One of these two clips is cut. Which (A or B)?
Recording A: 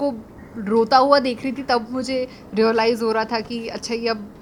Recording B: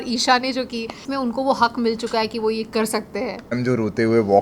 B